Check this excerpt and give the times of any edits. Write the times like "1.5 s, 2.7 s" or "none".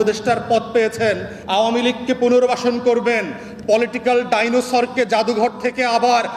1.3 s